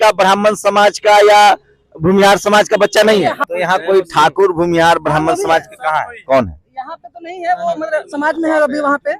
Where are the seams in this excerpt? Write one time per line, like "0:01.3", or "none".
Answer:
0:03.4